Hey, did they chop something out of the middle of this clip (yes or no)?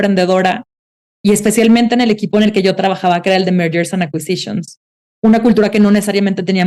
yes